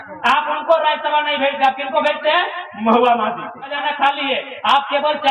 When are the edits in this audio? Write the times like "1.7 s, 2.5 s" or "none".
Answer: 3.8 s